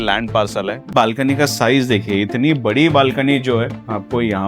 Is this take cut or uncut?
cut